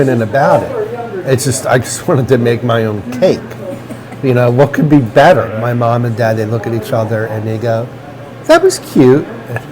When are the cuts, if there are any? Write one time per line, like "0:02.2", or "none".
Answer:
0:05.5